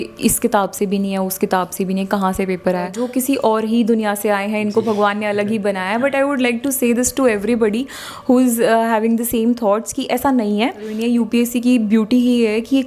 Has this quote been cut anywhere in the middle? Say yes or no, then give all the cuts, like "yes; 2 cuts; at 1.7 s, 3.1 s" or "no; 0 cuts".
yes; 2 cuts; at 3.0 s, 11.0 s